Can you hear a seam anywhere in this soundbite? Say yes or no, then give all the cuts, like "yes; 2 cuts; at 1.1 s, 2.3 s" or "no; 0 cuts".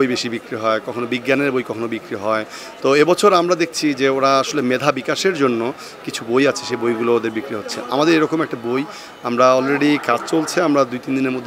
no; 0 cuts